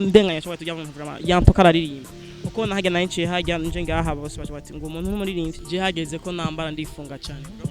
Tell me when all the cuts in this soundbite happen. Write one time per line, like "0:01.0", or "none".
0:05.6